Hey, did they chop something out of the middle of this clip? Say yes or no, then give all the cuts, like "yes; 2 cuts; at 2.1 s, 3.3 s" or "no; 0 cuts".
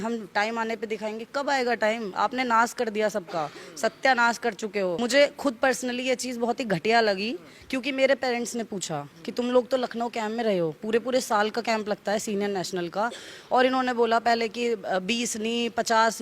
yes; 1 cut; at 5.0 s